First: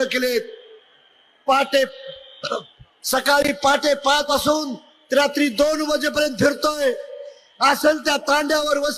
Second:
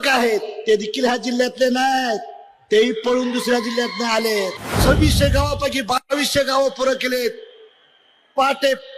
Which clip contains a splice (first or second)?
second